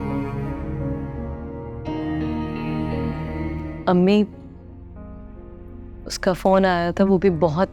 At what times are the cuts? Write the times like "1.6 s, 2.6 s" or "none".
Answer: 3.6 s

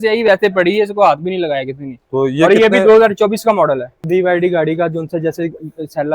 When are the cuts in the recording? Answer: 4.0 s

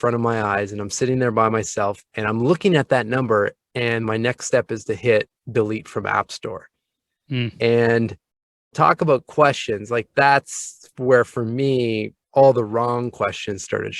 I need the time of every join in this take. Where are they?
2.1 s

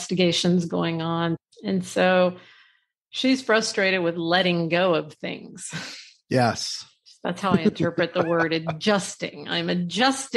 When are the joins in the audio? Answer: 1.4 s

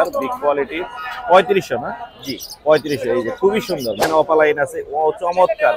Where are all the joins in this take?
4.0 s

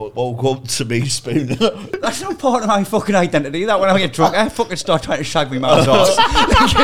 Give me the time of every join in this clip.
2.0 s

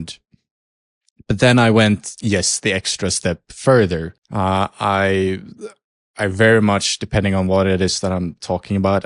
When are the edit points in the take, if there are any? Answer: 4.2 s

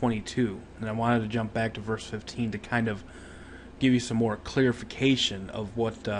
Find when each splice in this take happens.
2.8 s

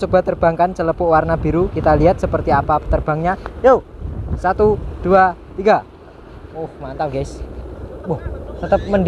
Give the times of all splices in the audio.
none

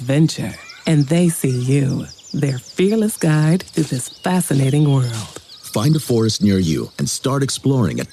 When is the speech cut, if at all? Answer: none

